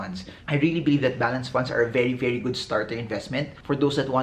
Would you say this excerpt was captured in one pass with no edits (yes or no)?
yes